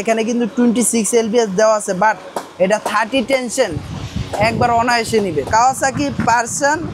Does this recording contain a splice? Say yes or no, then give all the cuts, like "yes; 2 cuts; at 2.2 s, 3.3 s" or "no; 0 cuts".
yes; 1 cut; at 5.4 s